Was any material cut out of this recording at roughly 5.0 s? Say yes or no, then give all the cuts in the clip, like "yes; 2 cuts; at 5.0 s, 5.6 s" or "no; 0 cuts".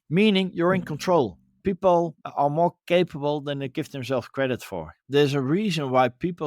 yes; 2 cuts; at 1.6 s, 5.0 s